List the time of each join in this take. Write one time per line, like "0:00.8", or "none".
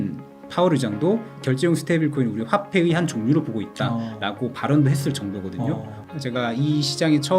0:01.4
0:06.0